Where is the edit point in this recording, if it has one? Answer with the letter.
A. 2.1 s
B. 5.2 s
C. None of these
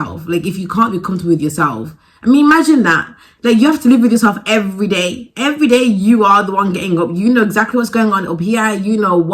C